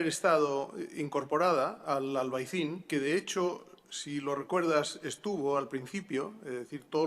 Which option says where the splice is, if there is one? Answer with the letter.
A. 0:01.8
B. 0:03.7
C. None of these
A